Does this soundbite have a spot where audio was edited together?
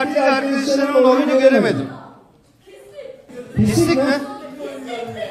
yes; 1 cut; at 3.3 s

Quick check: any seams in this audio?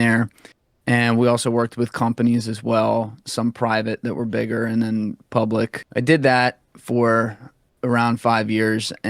yes; 1 cut; at 5.8 s

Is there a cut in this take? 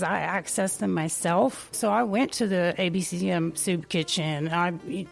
no; 0 cuts

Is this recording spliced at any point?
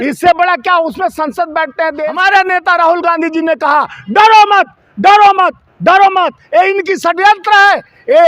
yes; 1 cut; at 2.1 s

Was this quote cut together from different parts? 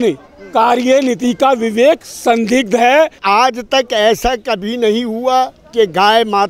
yes; 1 cut; at 3.2 s

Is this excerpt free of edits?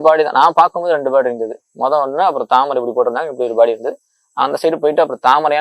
yes; 0 cuts

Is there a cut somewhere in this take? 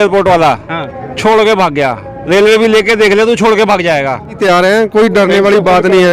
yes; 1 cut; at 4.4 s

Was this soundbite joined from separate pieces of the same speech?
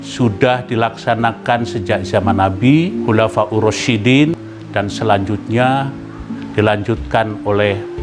yes; 2 cuts; at 3.0 s, 4.5 s

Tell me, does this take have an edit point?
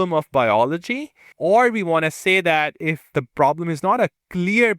yes; 2 cuts; at 1.2 s, 3.1 s

